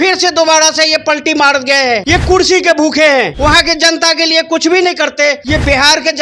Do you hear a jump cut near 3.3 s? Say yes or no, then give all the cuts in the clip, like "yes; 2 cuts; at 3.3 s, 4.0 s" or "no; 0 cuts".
yes; 3 cuts; at 2.0 s, 3.3 s, 5.4 s